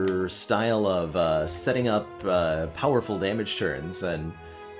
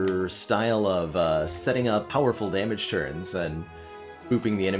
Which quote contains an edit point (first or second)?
second